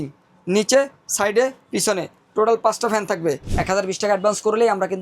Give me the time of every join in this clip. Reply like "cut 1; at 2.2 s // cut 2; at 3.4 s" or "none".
cut 1; at 3.5 s